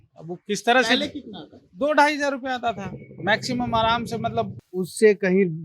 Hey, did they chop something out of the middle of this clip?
yes; 1 cut; at 4.5 s

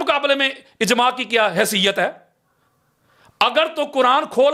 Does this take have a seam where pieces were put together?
no; 0 cuts

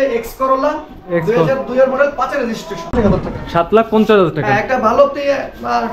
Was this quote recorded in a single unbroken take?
no; 1 cut; at 2.9 s

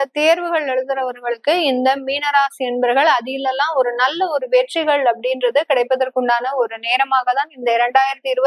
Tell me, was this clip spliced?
no; 0 cuts

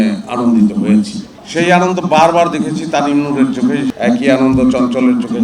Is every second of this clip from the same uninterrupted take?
no; 2 cuts; at 1.4 s, 3.9 s

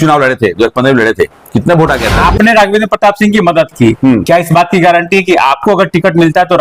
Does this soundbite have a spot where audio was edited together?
yes; 1 cut; at 2.1 s

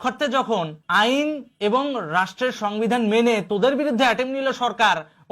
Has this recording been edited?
no; 0 cuts

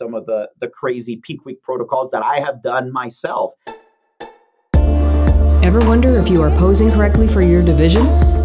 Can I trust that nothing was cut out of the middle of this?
no; 1 cut; at 3.7 s

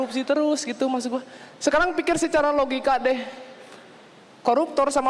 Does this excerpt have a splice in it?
no; 0 cuts

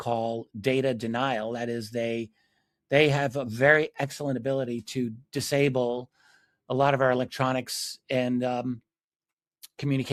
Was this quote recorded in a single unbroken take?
yes; 0 cuts

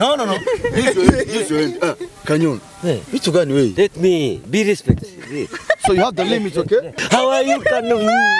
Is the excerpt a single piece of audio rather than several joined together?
no; 1 cut; at 6.9 s

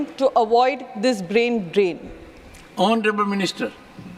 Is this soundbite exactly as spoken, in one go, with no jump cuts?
yes; 0 cuts

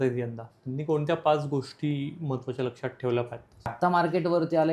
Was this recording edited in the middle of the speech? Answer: yes; 1 cut; at 3.7 s

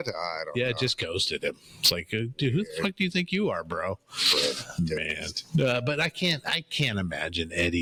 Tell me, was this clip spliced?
no; 0 cuts

